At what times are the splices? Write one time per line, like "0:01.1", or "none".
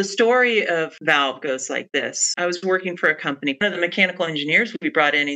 0:03.6